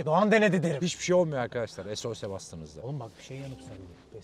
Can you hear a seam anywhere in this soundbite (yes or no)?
no